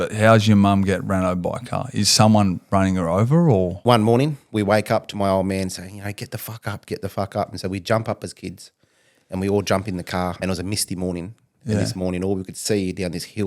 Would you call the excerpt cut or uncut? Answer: cut